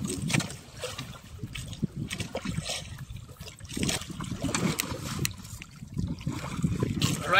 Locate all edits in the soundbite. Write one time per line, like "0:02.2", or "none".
0:04.0